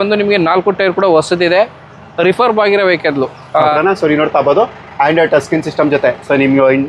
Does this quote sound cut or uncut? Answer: cut